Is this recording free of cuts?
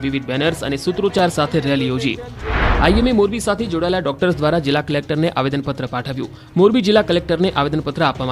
no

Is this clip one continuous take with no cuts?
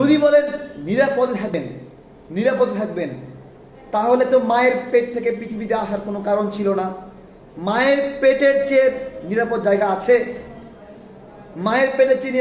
no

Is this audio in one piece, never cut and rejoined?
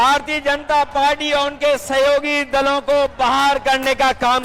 yes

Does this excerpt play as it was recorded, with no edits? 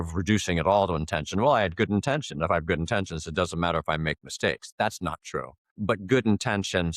yes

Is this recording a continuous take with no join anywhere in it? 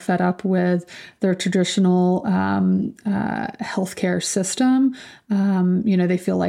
yes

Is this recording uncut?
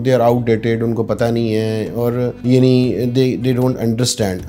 no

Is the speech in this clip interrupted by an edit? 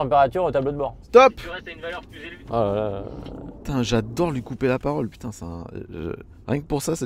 no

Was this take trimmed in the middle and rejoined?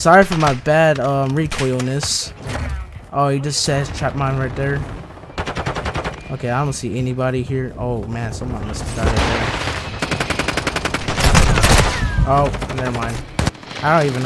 no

